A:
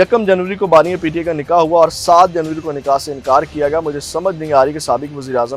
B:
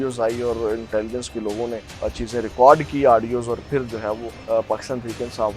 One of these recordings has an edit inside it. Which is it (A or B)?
B